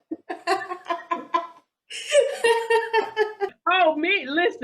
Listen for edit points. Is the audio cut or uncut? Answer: cut